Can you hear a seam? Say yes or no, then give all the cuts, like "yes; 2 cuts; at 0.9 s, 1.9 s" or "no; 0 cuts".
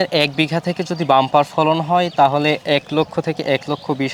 no; 0 cuts